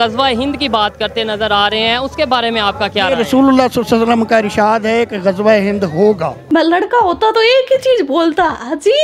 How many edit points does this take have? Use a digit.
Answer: 1